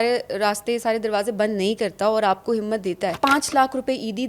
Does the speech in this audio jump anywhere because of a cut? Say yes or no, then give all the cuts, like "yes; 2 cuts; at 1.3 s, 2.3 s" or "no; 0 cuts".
yes; 1 cut; at 3.1 s